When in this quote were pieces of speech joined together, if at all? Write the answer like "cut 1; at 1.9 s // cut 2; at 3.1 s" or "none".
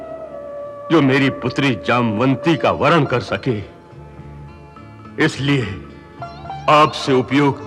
none